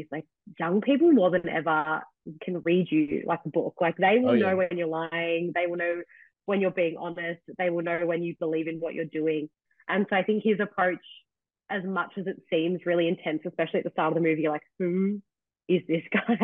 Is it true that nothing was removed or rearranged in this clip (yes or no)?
yes